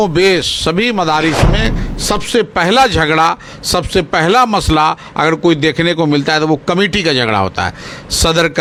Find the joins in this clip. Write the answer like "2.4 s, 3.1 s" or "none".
none